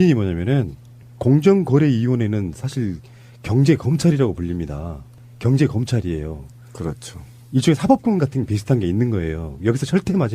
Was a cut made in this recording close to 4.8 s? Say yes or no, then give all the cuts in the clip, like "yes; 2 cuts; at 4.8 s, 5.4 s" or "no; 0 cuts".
yes; 1 cut; at 4.8 s